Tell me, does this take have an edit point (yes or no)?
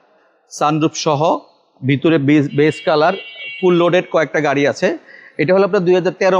no